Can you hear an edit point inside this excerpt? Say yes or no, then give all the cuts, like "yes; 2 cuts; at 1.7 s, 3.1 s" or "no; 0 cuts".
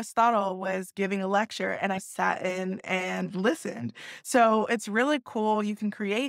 no; 0 cuts